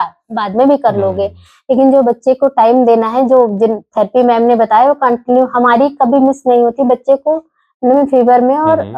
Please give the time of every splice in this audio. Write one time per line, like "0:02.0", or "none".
none